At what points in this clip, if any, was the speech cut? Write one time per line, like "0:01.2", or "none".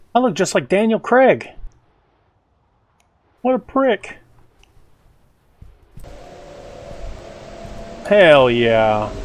0:06.0